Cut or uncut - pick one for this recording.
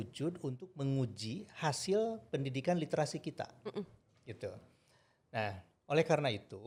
uncut